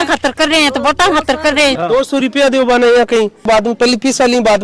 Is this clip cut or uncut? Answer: cut